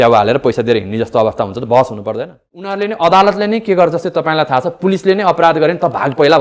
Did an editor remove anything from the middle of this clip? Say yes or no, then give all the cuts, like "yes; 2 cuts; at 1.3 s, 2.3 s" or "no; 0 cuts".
yes; 1 cut; at 2.5 s